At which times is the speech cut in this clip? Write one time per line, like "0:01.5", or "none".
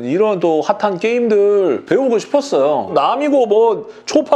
0:02.9